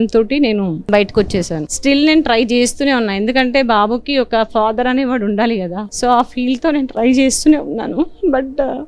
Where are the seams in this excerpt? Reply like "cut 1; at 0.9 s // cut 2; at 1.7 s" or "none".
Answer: cut 1; at 0.8 s // cut 2; at 1.7 s // cut 3; at 5.8 s